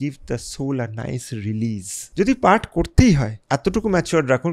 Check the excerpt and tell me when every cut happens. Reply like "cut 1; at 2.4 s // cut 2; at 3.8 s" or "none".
cut 1; at 1.9 s // cut 2; at 3.3 s